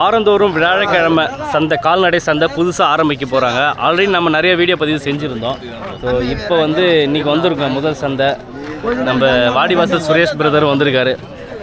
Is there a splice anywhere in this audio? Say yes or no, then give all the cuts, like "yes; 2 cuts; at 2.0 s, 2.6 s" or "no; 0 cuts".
no; 0 cuts